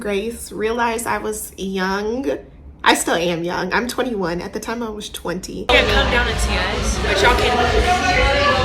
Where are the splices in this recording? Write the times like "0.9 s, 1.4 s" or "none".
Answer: 5.7 s